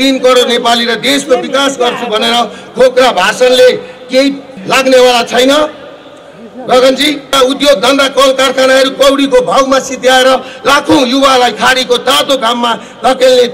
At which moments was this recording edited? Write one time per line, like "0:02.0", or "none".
0:04.6
0:07.3

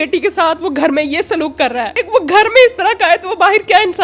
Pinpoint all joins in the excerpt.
0:02.0

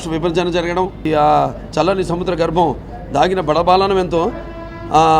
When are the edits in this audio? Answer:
0:01.0

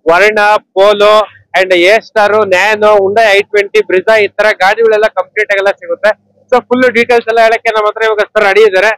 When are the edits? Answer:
none

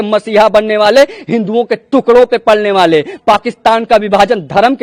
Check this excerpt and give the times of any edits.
none

